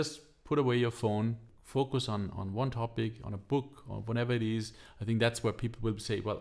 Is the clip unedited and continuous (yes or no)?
no